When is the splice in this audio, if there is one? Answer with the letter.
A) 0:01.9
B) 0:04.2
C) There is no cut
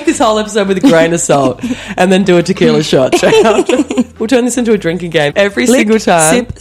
B